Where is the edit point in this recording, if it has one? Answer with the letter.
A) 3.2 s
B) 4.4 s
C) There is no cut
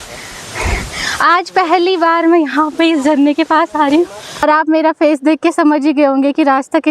B